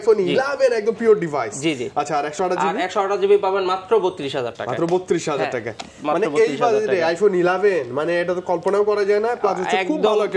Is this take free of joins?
yes; 0 cuts

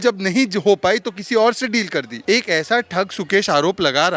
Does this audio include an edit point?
yes; 1 cut; at 2.1 s

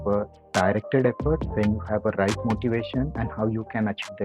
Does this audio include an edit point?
yes; 2 cuts; at 1.5 s, 3.2 s

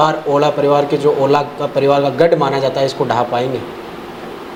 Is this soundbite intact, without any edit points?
yes; 0 cuts

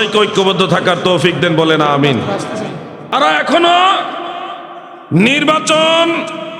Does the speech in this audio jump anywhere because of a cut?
yes; 1 cut; at 3.1 s

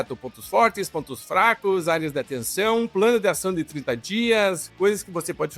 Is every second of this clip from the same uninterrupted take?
no; 1 cut; at 4.7 s

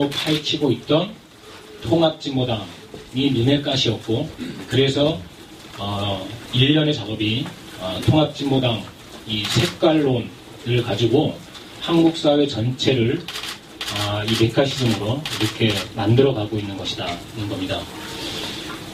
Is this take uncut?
yes; 0 cuts

